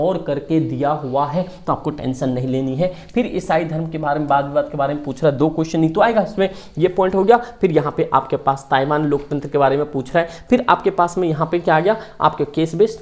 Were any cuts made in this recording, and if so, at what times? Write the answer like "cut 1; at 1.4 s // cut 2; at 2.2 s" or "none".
none

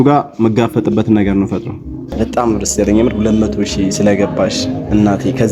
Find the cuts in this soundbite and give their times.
cut 1; at 2.1 s

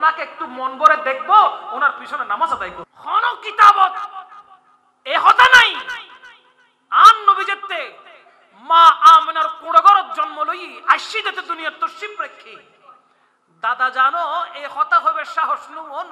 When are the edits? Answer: cut 1; at 2.8 s

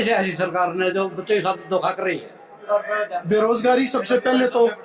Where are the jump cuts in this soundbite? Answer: cut 1; at 2.5 s

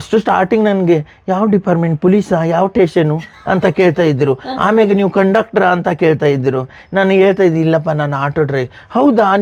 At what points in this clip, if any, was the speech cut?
none

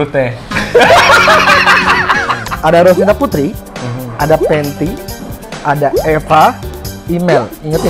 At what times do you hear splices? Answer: cut 1; at 2.4 s

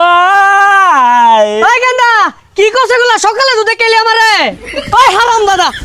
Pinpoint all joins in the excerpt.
cut 1; at 4.6 s

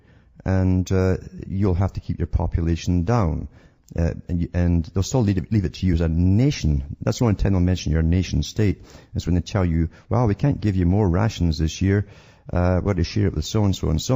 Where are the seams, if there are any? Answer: cut 1; at 11.8 s

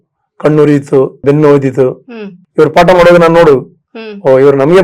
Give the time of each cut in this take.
cut 1; at 1.2 s // cut 2; at 2.4 s

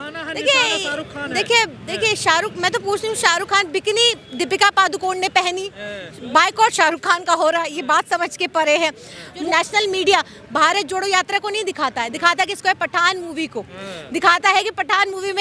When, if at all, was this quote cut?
cut 1; at 9.3 s

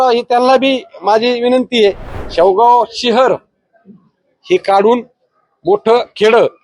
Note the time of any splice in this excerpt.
cut 1; at 2.1 s

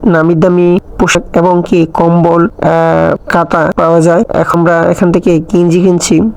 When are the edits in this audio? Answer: none

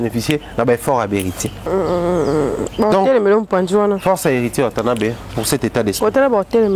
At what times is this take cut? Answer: cut 1; at 1.7 s

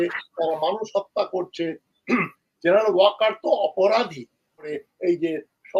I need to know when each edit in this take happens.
cut 1; at 4.7 s

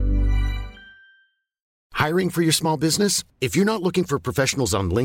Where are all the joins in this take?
cut 1; at 1.8 s

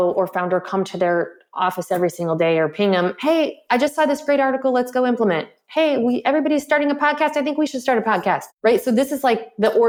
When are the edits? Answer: none

